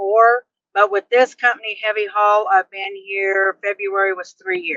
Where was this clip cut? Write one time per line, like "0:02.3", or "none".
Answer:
none